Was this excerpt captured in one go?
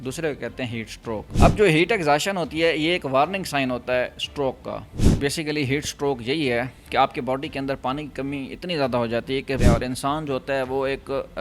no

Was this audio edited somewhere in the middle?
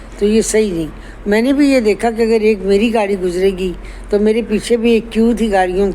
no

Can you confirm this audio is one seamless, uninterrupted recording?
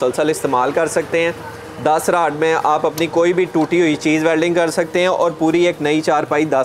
yes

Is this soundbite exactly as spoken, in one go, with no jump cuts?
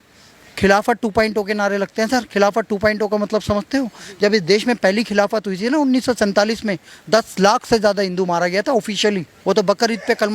no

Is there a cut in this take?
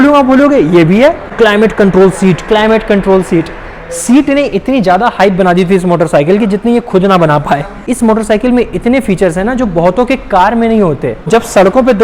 yes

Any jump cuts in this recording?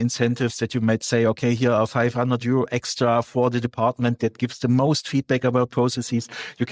no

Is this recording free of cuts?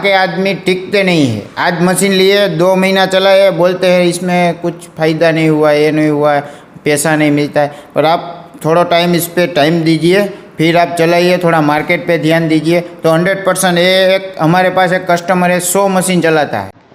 yes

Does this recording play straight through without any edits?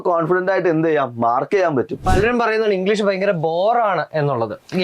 no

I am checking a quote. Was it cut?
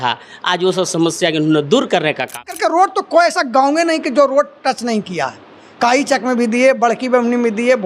yes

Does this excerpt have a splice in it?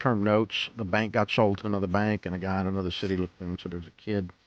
no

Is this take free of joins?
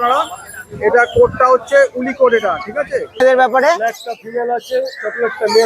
no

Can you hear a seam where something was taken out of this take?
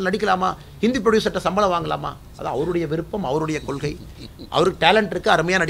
no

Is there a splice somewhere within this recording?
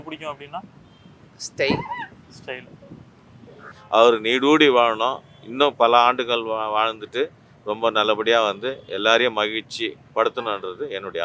no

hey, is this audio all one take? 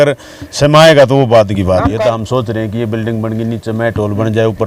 no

